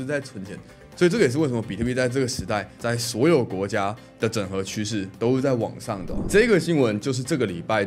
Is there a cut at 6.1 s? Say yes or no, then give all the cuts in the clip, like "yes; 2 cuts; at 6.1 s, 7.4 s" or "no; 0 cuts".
yes; 2 cuts; at 2.7 s, 6.1 s